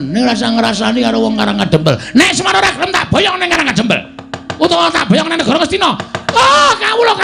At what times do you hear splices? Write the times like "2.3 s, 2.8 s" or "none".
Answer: none